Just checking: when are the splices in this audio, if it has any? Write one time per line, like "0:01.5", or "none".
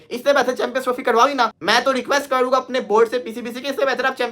none